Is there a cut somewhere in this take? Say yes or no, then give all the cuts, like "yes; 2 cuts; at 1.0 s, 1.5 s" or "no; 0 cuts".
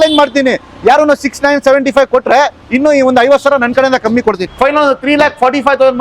yes; 1 cut; at 4.5 s